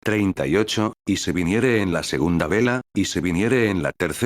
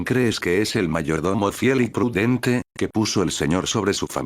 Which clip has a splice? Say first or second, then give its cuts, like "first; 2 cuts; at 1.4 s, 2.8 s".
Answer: first; 1 cut; at 2.8 s